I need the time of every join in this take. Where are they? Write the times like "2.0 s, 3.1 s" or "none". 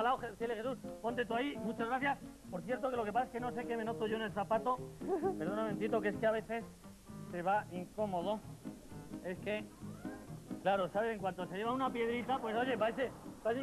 6.2 s